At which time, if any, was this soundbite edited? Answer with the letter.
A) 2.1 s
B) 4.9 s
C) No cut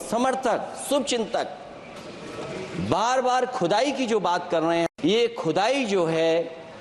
B